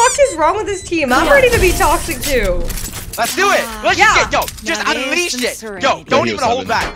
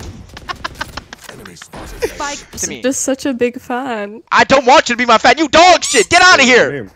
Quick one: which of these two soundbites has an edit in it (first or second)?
second